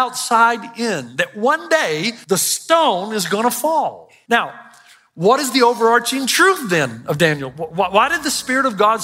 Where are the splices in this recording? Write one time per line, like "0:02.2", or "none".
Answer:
0:02.1
0:04.1